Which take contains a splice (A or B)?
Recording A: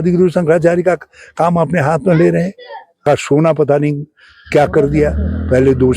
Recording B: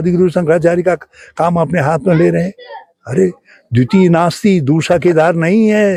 A